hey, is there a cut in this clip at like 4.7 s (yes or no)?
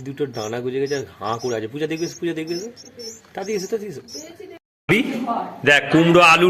yes